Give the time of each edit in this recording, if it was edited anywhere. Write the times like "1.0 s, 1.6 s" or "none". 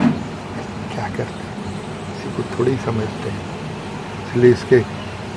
none